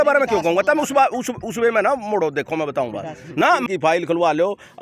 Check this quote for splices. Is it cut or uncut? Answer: cut